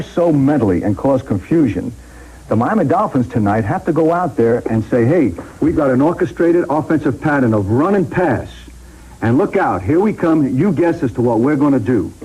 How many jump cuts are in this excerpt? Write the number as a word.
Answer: one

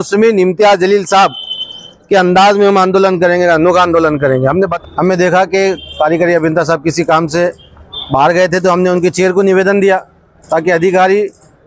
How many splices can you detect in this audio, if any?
one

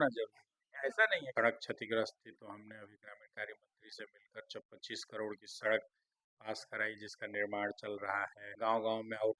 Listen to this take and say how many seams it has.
two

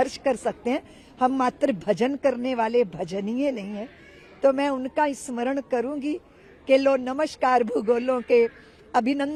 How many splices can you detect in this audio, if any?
zero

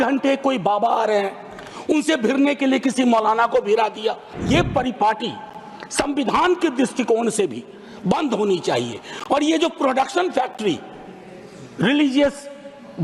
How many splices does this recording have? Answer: one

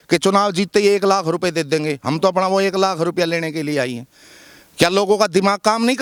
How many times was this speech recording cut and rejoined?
zero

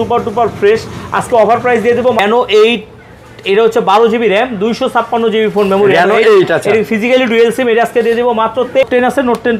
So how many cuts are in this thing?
two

